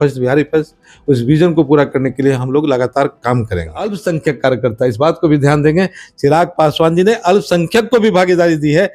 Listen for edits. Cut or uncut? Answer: cut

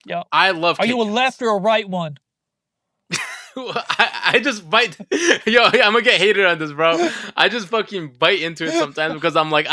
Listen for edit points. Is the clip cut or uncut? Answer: uncut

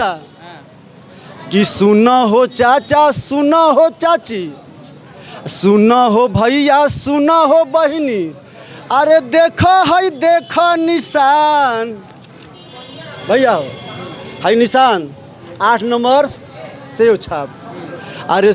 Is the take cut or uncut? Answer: uncut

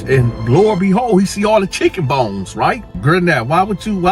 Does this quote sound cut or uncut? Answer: cut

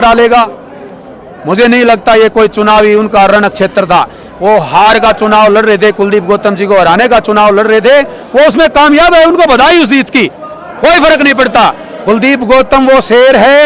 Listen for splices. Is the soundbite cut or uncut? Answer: uncut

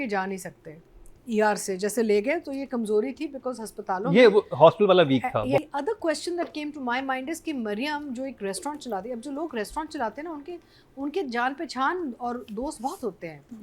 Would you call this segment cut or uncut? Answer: cut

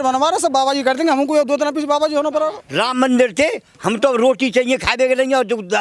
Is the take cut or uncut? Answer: cut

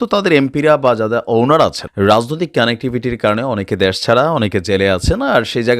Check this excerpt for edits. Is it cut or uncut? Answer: cut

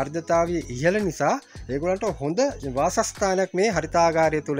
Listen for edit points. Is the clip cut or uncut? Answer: cut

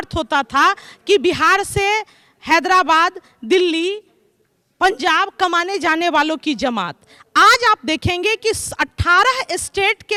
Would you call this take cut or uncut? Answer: uncut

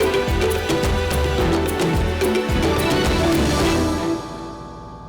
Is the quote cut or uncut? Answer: cut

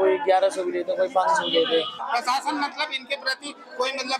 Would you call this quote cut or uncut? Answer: cut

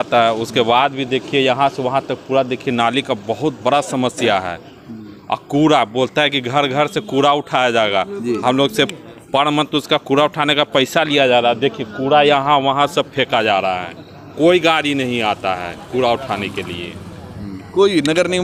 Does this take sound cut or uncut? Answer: uncut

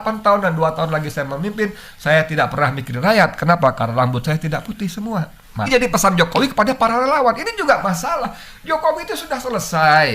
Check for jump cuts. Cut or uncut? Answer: cut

